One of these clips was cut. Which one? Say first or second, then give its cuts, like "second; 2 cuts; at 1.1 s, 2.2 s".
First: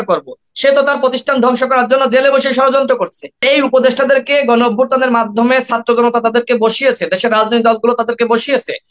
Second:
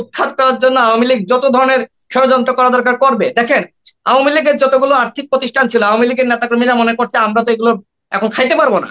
first; 1 cut; at 3.4 s